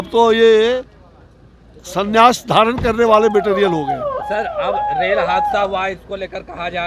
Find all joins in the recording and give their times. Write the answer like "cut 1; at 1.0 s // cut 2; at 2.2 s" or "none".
none